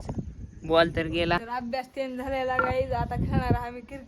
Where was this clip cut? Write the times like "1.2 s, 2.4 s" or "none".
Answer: 1.4 s